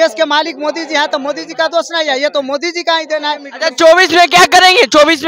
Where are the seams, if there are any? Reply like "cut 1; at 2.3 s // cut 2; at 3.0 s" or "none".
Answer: cut 1; at 3.5 s

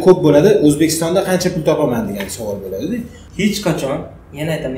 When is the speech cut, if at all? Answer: cut 1; at 3.2 s

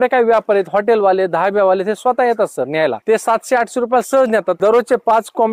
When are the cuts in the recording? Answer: cut 1; at 3.0 s // cut 2; at 4.6 s

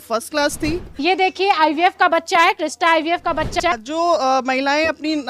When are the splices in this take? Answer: cut 1; at 1.0 s // cut 2; at 3.6 s

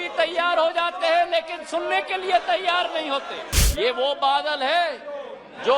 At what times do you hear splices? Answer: cut 1; at 3.5 s

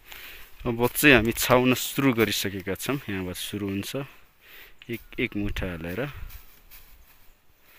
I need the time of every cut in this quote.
none

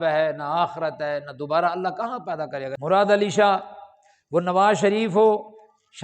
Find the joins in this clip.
cut 1; at 2.7 s

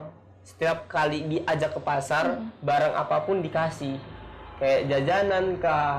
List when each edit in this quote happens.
none

